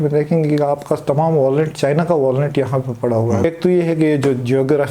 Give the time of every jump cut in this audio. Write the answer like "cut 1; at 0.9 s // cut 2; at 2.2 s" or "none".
cut 1; at 3.4 s